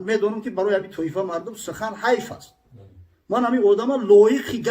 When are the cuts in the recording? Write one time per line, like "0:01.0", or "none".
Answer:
none